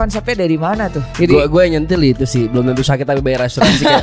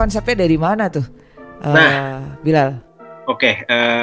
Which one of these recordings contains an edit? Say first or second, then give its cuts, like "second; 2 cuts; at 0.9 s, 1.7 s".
first; 1 cut; at 1.0 s